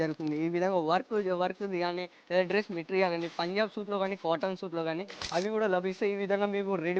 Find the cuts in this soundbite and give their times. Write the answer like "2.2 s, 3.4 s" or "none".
5.2 s